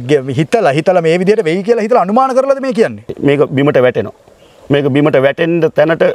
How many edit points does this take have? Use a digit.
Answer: 1